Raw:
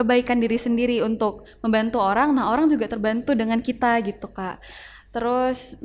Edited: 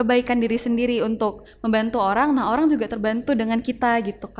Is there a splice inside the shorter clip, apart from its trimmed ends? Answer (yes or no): no